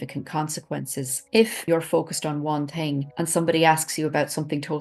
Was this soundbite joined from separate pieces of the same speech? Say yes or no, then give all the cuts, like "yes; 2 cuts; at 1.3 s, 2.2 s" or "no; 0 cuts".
yes; 2 cuts; at 1.6 s, 3.1 s